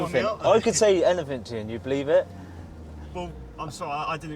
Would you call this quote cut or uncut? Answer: uncut